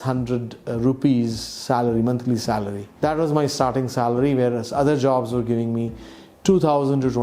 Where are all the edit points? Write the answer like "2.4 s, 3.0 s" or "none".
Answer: 2.8 s